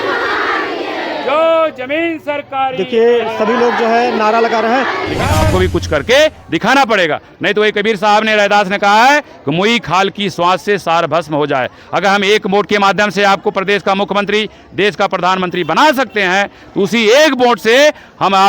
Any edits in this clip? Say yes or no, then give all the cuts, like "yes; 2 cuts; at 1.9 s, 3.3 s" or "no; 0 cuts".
yes; 1 cut; at 5.5 s